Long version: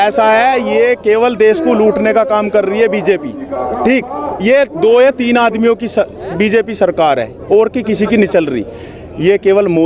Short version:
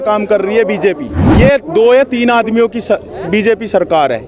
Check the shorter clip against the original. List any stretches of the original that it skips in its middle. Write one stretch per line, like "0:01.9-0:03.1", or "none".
0:03.4-0:04.3